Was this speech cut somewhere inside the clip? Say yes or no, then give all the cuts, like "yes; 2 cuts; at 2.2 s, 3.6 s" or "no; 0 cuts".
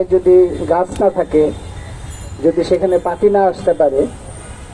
no; 0 cuts